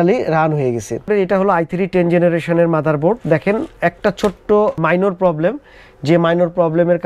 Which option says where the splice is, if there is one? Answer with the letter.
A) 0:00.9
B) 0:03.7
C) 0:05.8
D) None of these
A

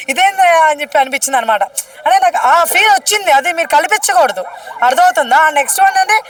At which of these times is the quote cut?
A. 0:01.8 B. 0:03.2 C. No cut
C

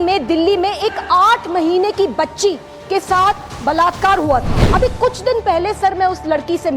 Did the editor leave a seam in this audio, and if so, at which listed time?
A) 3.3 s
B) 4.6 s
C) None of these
B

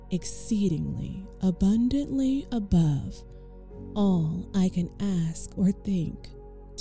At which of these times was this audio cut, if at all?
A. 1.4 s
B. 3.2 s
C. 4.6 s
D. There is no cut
D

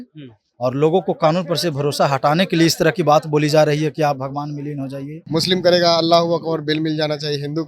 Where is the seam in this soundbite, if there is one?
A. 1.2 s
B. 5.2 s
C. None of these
B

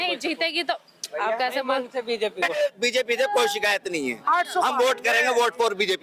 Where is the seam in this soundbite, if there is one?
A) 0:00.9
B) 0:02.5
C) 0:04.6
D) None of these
B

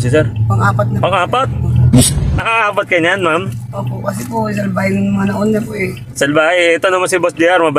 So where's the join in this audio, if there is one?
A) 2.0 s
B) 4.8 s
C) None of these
A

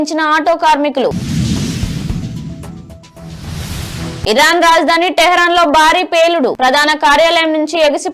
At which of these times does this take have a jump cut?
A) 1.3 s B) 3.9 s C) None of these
C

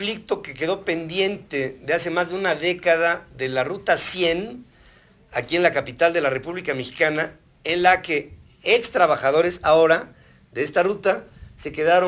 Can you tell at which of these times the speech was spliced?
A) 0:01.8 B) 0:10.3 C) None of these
C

